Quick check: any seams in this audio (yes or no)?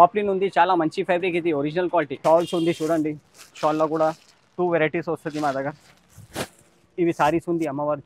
yes